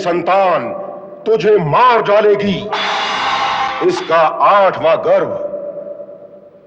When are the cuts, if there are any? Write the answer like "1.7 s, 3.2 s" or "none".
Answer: 3.8 s